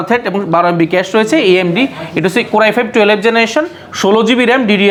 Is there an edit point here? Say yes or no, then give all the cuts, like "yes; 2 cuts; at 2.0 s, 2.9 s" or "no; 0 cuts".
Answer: no; 0 cuts